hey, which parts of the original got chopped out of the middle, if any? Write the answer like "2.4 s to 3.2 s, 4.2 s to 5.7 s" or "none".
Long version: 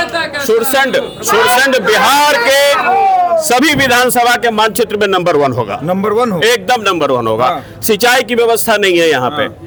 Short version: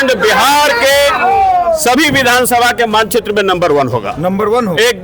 none